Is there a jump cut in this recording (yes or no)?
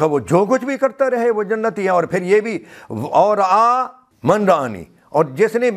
yes